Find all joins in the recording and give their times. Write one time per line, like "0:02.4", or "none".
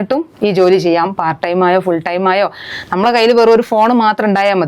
none